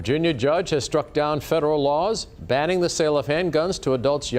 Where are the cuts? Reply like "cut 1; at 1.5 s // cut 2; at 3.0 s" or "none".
none